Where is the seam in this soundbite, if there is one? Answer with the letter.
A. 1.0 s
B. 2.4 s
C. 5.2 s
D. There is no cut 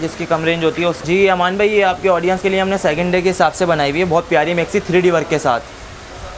A